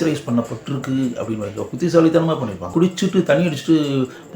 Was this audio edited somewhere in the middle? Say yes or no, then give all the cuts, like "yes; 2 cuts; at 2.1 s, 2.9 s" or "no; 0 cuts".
yes; 1 cut; at 2.7 s